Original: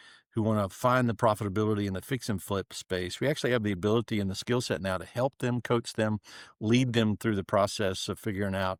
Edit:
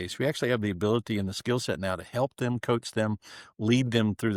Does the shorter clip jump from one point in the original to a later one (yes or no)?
no